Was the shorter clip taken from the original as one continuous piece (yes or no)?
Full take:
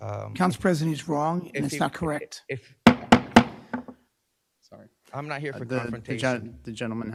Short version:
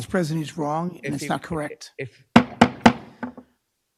yes